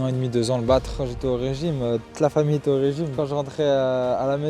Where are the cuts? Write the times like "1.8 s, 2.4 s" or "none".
0.9 s, 3.2 s